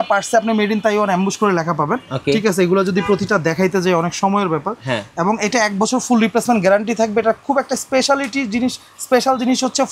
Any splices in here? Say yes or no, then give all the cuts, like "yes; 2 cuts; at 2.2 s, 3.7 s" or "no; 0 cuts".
no; 0 cuts